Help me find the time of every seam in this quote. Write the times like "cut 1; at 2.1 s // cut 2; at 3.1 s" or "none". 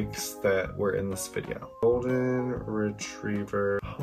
cut 1; at 1.7 s